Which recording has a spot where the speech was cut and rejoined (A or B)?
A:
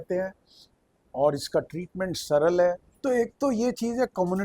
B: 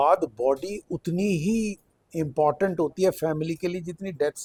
A